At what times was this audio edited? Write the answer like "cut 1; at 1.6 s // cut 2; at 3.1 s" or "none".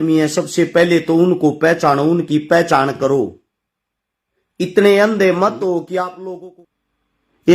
cut 1; at 6.4 s